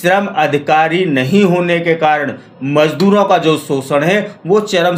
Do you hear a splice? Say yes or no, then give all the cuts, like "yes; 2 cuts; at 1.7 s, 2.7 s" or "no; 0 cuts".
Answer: no; 0 cuts